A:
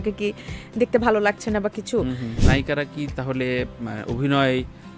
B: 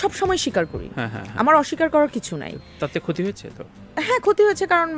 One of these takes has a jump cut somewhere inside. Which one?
A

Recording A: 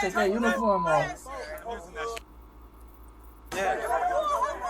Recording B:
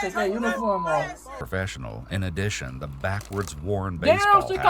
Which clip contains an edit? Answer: B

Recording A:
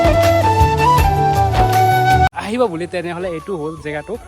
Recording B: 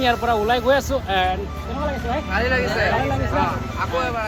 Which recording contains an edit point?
A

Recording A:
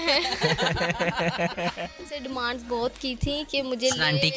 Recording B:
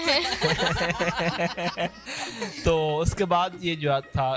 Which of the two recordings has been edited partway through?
A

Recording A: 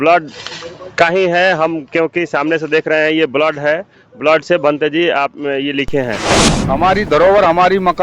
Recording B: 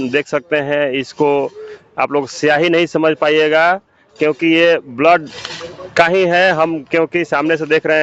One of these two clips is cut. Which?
A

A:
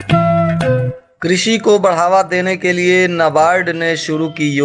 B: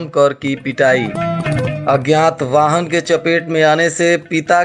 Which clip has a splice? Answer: A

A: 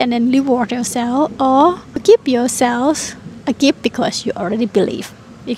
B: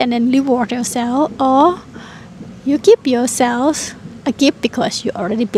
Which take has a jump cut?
A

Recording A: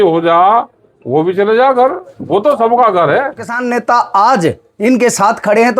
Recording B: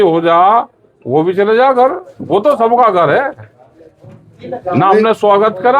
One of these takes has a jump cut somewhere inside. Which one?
A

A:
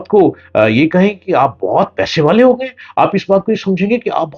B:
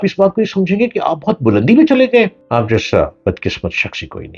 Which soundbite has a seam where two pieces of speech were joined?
B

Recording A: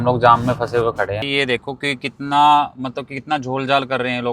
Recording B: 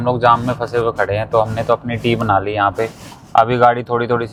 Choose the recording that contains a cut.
A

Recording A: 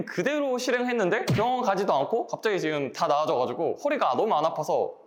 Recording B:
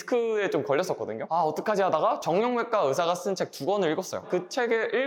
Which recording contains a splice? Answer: B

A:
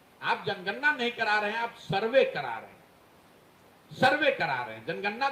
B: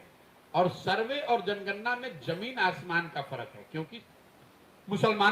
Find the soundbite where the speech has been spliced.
B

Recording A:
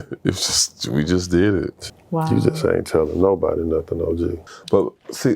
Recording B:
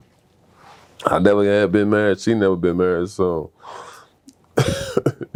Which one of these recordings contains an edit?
A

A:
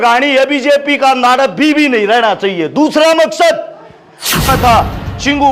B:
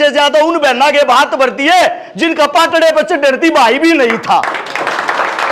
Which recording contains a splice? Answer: A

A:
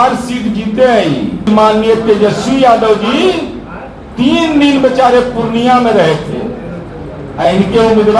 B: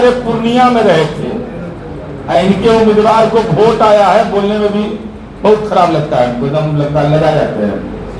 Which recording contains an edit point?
A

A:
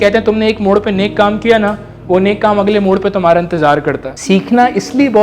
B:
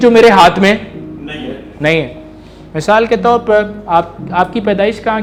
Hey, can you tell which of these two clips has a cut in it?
A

